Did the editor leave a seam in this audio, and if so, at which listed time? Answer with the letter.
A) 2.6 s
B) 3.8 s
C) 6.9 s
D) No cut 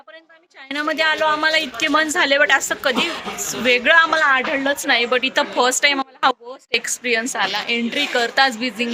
D